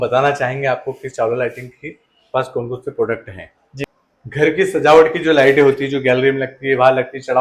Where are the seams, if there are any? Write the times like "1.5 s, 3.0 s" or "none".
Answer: 3.9 s